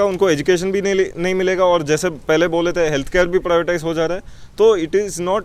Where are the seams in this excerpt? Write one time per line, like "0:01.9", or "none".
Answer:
none